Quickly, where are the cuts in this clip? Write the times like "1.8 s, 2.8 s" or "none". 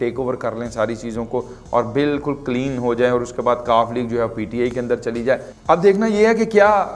none